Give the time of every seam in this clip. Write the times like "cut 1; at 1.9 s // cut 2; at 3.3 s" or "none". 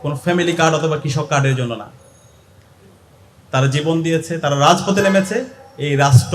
none